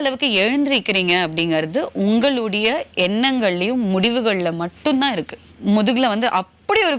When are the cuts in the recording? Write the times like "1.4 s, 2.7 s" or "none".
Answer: 5.5 s